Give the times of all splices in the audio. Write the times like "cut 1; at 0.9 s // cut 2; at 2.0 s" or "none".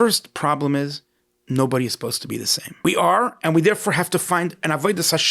cut 1; at 2.6 s